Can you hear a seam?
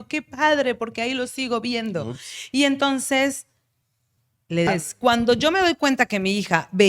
yes; 1 cut; at 4.7 s

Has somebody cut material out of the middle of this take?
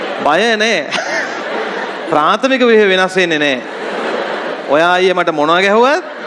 no; 0 cuts

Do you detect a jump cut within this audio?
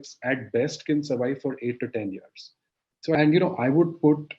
yes; 1 cut; at 3.1 s

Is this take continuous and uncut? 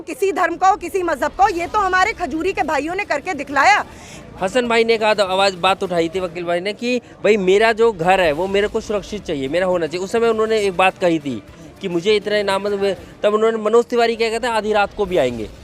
no; 1 cut; at 4.1 s

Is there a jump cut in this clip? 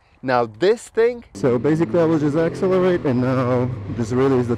yes; 1 cut; at 1.3 s

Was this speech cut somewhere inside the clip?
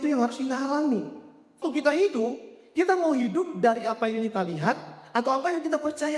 yes; 1 cut; at 1.6 s

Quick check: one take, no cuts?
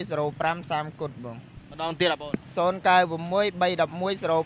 yes; 0 cuts

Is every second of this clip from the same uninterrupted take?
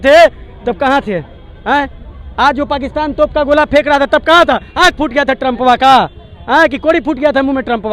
yes; 0 cuts

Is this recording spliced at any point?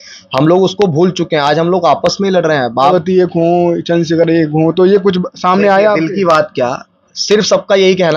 yes; 1 cut; at 2.9 s

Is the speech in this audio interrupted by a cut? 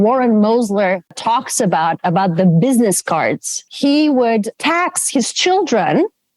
yes; 1 cut; at 3.6 s

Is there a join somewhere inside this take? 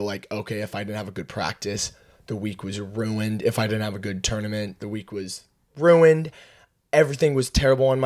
no; 0 cuts

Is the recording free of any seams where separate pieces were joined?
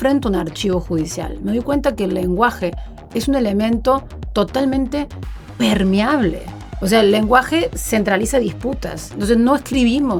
yes; 0 cuts

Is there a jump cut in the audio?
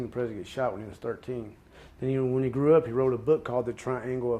yes; 1 cut; at 3.2 s

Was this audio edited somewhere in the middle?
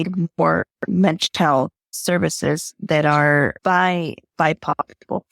yes; 2 cuts; at 1.9 s, 3.6 s

